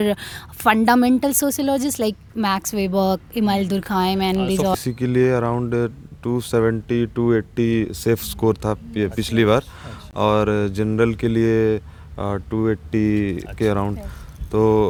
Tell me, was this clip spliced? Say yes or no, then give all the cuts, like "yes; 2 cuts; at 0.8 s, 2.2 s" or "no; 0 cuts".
no; 0 cuts